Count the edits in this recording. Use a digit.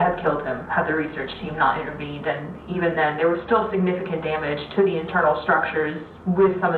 0